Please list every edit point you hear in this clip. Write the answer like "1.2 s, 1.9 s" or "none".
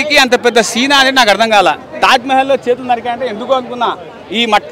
none